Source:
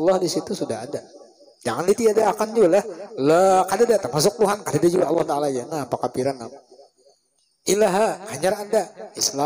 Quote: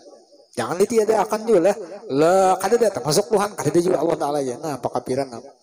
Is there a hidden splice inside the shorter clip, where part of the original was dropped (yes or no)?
no